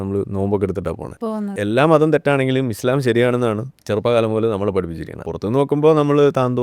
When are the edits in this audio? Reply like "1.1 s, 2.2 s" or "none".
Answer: 1.5 s, 3.7 s, 5.3 s